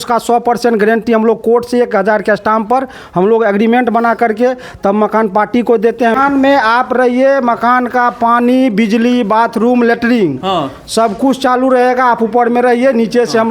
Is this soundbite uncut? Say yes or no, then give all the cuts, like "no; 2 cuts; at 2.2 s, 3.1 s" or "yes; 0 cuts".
no; 1 cut; at 6.2 s